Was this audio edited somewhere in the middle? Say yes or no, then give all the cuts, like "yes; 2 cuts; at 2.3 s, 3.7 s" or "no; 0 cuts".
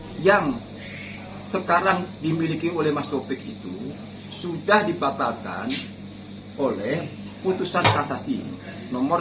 no; 0 cuts